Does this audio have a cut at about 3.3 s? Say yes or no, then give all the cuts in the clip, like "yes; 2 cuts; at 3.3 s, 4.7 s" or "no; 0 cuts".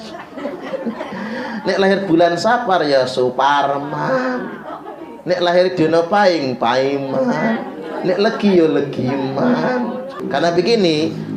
no; 1 cut; at 10.2 s